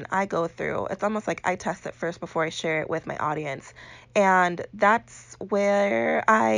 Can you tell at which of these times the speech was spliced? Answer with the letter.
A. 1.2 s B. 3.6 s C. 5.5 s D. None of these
D